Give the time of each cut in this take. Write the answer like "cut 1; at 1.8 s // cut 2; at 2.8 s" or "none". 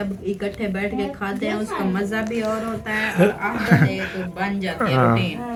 none